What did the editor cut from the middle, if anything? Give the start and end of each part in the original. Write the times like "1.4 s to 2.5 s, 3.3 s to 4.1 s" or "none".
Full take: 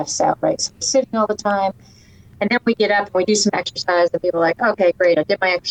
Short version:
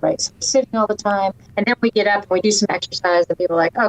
1.8 s to 2.3 s